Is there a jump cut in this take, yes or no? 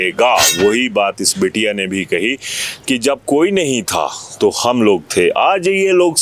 no